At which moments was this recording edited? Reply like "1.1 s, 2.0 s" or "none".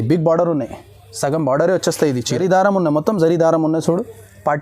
2.4 s